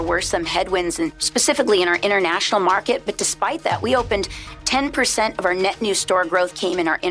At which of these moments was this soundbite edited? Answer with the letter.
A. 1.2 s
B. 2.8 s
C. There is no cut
A